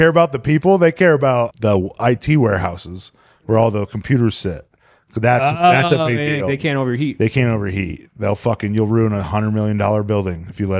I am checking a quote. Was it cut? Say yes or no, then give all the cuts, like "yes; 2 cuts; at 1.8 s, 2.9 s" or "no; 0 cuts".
yes; 1 cut; at 1.5 s